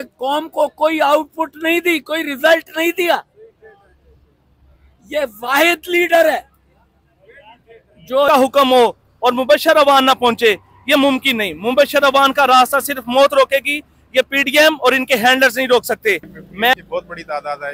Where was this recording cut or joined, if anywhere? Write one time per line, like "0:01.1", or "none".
0:08.3
0:16.7